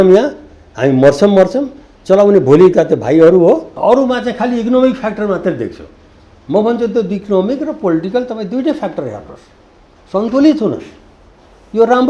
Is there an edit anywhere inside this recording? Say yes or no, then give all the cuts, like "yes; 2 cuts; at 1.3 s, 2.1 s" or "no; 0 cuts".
yes; 1 cut; at 3.7 s